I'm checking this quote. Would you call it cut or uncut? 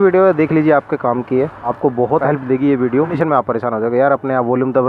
cut